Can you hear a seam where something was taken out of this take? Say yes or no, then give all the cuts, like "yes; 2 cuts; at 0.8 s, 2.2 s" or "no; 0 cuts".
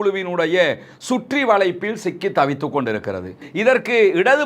yes; 1 cut; at 3.5 s